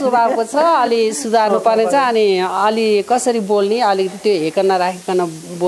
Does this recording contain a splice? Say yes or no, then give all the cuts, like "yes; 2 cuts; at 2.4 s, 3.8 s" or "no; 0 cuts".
no; 0 cuts